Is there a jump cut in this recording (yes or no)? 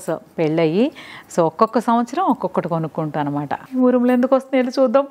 yes